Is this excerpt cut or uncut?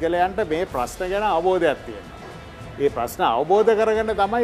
uncut